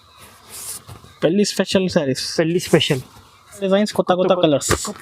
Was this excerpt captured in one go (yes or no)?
no